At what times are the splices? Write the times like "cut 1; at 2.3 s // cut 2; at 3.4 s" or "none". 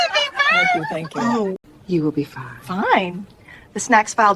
cut 1; at 1.7 s